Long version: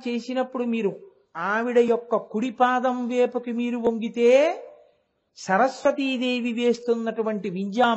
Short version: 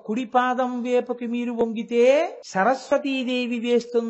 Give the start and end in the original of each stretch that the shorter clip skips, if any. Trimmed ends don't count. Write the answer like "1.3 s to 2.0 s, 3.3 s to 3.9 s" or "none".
4.7 s to 5.3 s

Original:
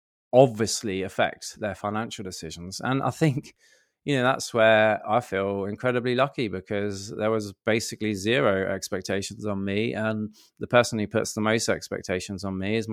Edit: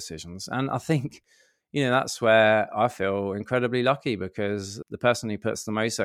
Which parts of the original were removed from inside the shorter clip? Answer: 7.1 s to 10.4 s

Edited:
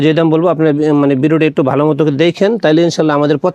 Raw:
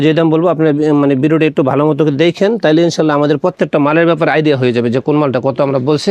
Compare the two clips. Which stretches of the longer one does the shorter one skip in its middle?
none

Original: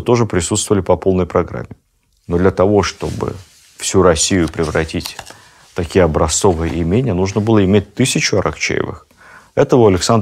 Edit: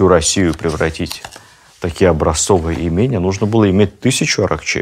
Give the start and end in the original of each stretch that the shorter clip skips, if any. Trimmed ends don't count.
none

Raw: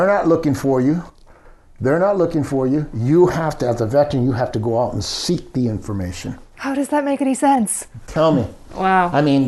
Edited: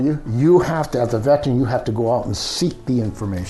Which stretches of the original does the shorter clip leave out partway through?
none

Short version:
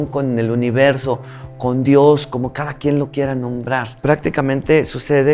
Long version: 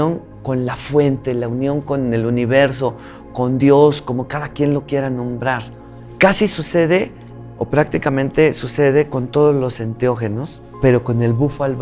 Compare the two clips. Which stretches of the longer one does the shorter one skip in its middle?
5.7 s to 7.6 s

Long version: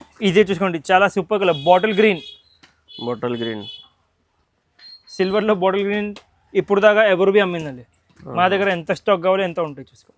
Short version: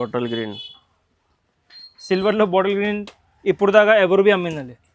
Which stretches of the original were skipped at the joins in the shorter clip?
none

